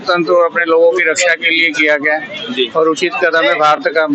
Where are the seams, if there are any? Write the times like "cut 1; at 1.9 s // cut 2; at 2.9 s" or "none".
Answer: none